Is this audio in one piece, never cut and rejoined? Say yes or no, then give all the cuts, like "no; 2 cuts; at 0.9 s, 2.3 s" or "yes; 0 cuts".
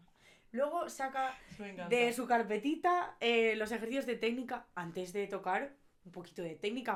yes; 0 cuts